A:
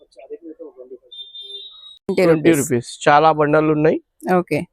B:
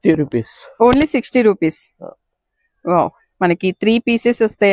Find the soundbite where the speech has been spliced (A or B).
A